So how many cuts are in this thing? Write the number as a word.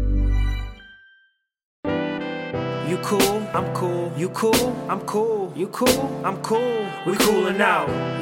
one